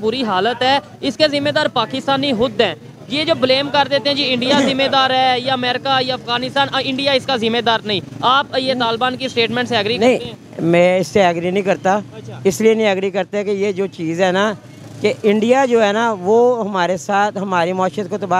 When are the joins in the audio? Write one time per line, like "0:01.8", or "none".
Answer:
none